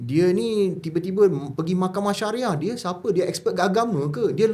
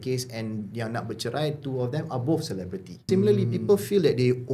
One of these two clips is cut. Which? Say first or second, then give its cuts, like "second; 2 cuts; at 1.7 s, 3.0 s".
second; 1 cut; at 3.1 s